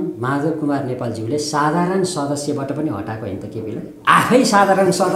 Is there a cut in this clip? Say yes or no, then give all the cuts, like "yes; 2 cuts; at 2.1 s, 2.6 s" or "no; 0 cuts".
yes; 1 cut; at 3.9 s